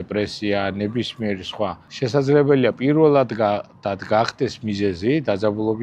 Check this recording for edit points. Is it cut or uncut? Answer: cut